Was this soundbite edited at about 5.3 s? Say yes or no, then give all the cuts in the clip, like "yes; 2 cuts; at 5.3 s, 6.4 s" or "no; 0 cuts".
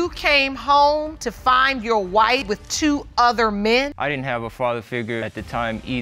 yes; 2 cuts; at 3.9 s, 5.3 s